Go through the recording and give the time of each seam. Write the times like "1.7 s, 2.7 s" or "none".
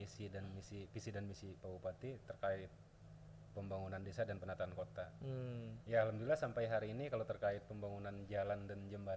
none